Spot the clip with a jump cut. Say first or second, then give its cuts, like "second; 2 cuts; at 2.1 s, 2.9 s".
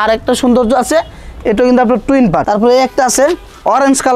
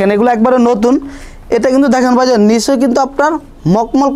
first; 1 cut; at 2.4 s